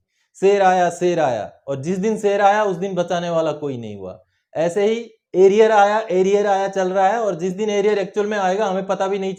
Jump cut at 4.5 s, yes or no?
no